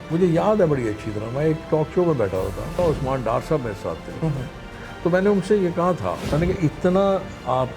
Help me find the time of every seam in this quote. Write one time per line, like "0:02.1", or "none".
0:02.8
0:06.2